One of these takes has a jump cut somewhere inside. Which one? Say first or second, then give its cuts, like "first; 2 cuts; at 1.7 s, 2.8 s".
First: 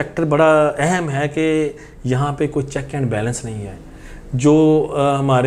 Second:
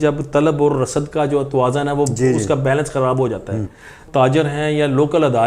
second; 1 cut; at 4.0 s